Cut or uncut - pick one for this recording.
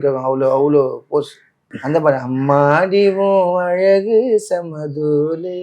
cut